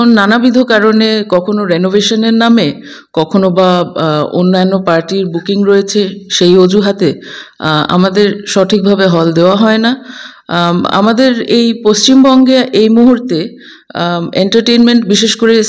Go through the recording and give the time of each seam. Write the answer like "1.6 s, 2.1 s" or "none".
none